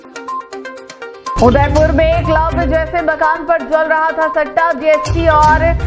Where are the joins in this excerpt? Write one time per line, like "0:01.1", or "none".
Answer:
0:01.3